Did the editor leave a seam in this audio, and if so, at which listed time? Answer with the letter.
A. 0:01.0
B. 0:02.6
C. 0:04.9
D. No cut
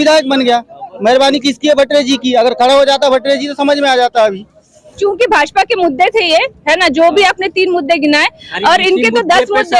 C